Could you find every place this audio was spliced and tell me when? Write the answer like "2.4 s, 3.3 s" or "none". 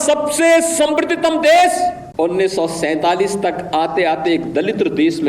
2.0 s